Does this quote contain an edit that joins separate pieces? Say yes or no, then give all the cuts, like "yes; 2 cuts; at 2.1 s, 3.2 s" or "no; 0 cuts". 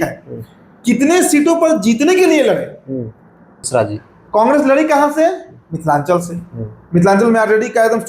yes; 1 cut; at 3.6 s